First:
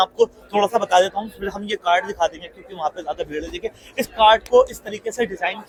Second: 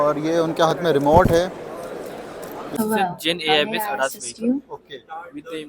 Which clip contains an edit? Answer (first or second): second